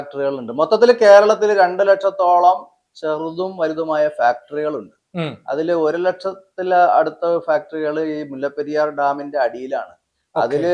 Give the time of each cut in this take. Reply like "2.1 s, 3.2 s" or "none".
none